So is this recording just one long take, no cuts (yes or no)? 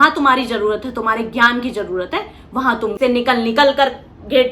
no